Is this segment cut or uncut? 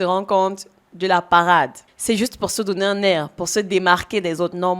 uncut